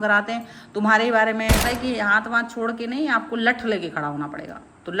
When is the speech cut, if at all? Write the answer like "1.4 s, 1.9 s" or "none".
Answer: 1.6 s